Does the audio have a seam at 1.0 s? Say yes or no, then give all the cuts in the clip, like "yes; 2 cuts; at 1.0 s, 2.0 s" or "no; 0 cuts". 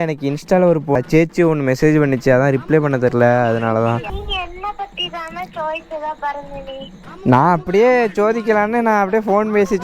yes; 2 cuts; at 1.0 s, 4.1 s